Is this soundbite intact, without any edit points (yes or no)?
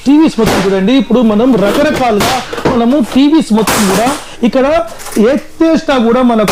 yes